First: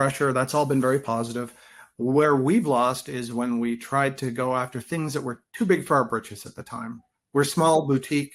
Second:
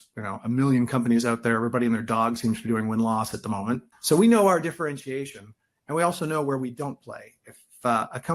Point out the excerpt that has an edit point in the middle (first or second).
second